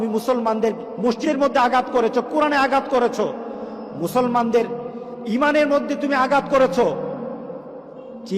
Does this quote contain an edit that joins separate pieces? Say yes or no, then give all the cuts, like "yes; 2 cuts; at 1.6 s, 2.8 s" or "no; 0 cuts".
yes; 1 cut; at 1.2 s